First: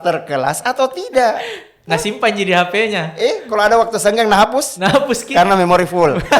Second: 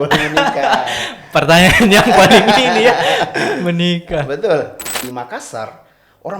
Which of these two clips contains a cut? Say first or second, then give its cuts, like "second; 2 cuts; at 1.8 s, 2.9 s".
second; 1 cut; at 4.9 s